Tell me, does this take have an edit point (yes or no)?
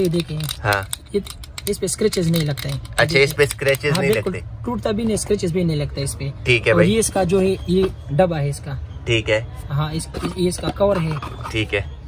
no